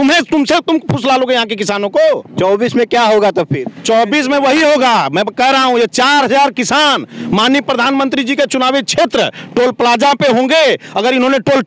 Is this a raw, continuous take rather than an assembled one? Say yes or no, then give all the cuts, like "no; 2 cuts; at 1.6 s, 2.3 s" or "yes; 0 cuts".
yes; 0 cuts